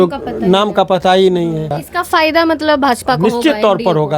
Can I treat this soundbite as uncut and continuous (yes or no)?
no